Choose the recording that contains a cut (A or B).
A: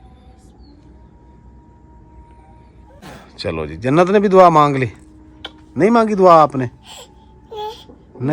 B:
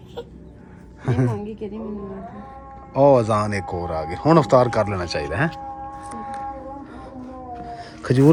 A